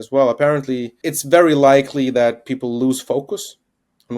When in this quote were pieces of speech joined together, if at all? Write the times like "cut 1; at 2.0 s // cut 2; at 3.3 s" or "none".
cut 1; at 0.9 s